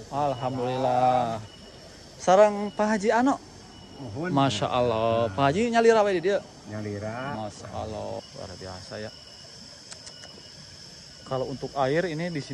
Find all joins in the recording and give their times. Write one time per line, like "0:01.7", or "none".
0:08.2